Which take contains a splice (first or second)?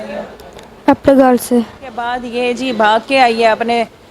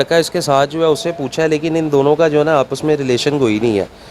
first